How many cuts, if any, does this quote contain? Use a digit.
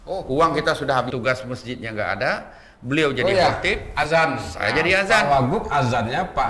1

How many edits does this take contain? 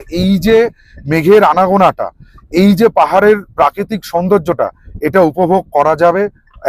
0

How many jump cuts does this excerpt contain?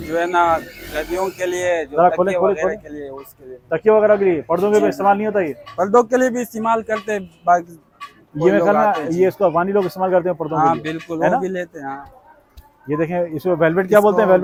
0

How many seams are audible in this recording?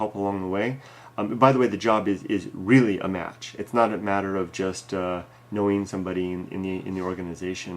1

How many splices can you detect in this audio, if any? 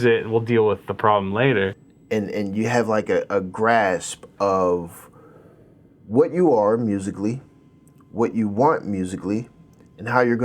1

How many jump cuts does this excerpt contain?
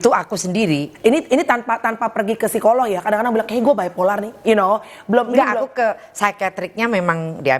0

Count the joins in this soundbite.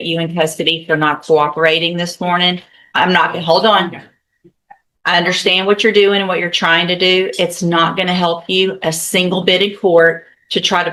0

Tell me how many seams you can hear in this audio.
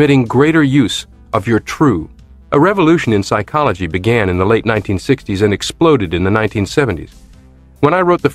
1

